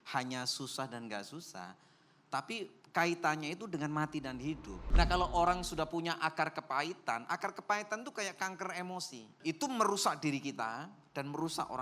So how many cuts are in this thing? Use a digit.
2